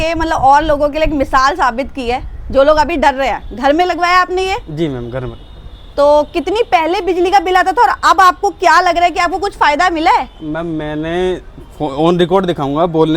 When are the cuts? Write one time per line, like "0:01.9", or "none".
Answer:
none